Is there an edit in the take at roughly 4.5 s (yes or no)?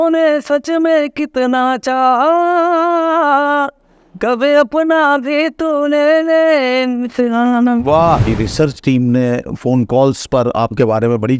no